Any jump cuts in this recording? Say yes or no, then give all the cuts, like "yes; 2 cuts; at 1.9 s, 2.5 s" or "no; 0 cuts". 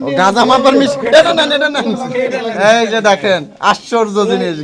no; 0 cuts